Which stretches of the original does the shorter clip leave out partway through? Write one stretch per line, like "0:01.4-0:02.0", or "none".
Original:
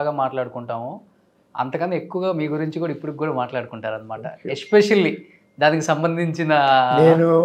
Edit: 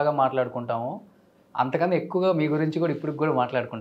none